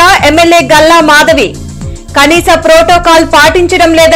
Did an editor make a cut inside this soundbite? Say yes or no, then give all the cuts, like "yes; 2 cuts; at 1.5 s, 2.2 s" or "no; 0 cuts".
no; 0 cuts